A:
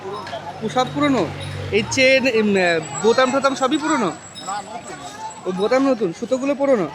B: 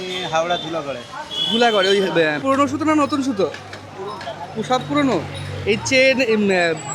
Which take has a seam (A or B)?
B